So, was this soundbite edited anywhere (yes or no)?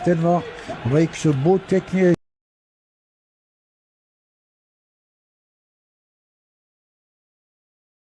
no